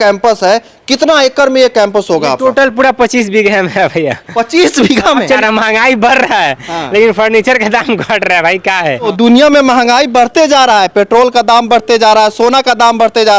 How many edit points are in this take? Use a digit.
2